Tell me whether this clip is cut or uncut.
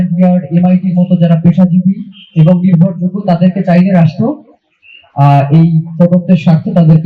uncut